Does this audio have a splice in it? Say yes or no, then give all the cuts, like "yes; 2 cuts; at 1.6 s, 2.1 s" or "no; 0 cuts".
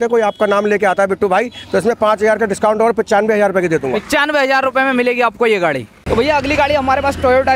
no; 0 cuts